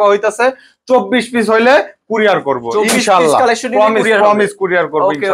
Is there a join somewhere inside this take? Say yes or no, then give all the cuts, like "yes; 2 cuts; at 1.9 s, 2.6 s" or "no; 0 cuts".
no; 0 cuts